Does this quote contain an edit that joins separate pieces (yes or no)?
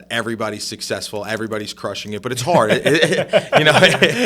no